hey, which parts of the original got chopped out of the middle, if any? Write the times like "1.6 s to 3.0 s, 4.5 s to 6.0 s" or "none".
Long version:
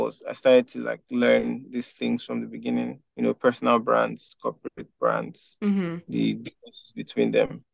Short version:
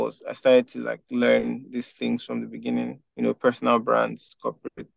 none